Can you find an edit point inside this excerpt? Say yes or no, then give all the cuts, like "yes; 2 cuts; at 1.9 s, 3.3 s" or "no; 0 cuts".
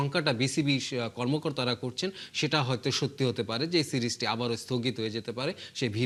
no; 0 cuts